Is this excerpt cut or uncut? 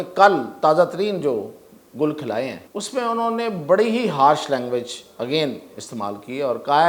cut